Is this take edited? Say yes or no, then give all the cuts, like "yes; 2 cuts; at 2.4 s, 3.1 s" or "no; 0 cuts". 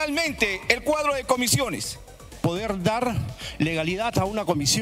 yes; 1 cut; at 2.4 s